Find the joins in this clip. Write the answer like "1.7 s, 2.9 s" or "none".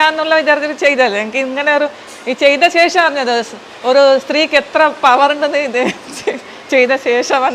none